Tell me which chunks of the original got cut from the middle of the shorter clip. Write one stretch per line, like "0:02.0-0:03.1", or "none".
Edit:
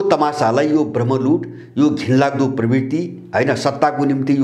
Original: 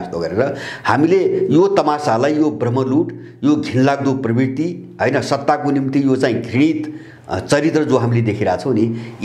none